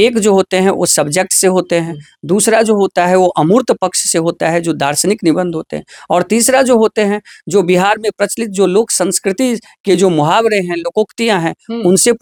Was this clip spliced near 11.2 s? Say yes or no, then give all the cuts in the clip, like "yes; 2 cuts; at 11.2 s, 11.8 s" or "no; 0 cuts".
no; 0 cuts